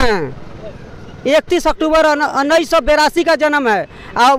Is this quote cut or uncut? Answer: uncut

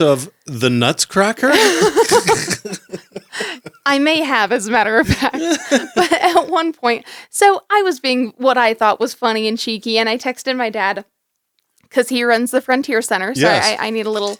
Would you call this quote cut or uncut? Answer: uncut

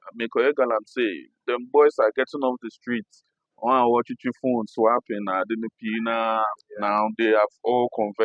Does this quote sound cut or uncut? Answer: uncut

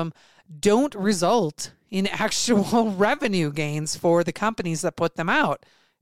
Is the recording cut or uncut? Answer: uncut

